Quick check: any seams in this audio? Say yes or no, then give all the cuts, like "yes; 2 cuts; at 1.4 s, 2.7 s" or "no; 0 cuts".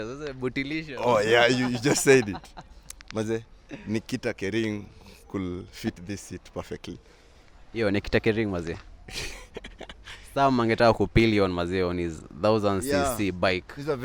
no; 0 cuts